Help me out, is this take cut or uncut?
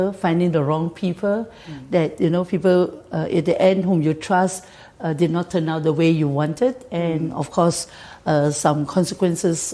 uncut